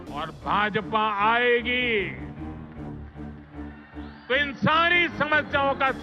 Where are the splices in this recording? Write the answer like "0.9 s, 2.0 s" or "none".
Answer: 2.2 s, 4.2 s